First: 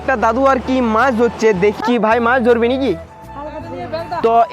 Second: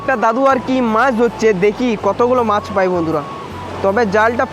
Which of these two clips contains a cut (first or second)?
first